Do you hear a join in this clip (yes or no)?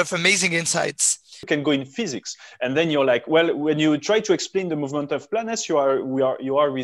yes